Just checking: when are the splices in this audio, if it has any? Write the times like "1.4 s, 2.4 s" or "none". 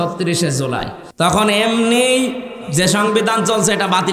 1.0 s